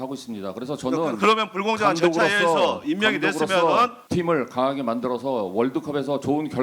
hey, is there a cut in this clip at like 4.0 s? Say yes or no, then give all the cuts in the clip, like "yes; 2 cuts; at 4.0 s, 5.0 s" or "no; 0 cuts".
yes; 1 cut; at 4.0 s